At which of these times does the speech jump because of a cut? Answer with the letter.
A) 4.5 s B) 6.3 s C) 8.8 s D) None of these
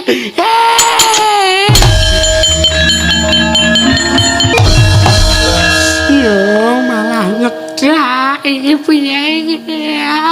A